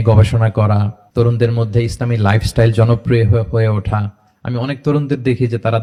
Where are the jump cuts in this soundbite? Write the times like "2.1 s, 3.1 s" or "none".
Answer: none

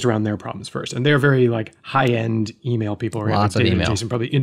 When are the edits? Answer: none

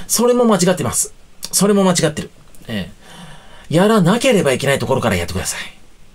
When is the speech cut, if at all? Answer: none

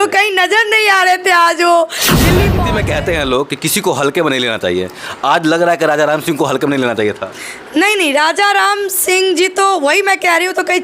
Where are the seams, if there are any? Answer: 2.5 s

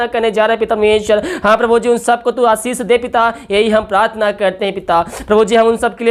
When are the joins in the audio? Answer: none

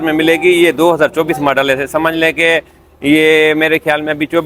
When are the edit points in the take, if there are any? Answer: none

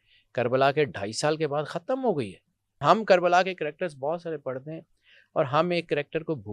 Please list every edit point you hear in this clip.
2.8 s

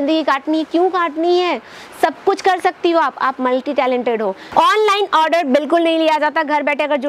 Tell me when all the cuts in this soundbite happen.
4.4 s

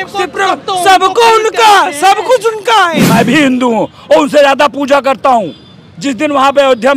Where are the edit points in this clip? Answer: 3.0 s

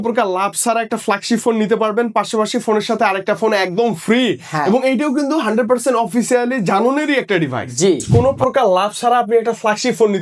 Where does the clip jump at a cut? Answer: 8.0 s

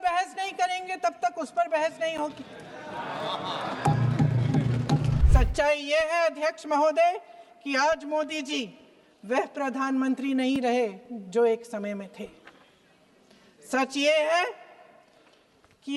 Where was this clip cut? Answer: 5.1 s

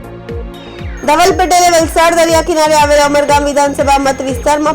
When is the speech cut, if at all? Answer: 1.0 s

